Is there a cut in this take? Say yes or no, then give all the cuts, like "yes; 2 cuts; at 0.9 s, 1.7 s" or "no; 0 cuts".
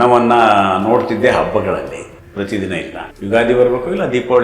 yes; 2 cuts; at 2.2 s, 3.0 s